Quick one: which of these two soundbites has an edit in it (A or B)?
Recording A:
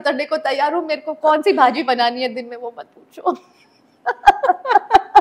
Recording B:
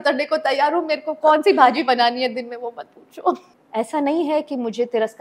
B